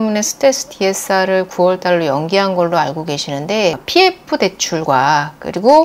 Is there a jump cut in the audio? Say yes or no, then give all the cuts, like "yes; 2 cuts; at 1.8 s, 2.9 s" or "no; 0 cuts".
yes; 1 cut; at 3.8 s